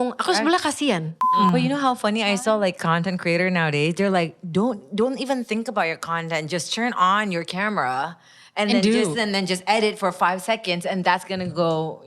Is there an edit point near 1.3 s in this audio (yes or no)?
yes